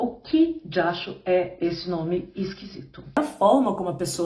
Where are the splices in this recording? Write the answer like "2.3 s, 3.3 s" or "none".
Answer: 3.2 s